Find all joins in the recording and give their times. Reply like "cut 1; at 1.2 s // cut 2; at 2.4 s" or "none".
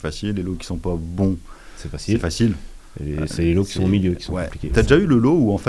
cut 1; at 4.6 s